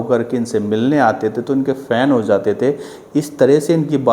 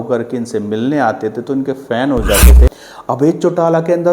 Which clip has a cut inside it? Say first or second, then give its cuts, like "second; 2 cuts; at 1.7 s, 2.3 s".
second; 1 cut; at 2.7 s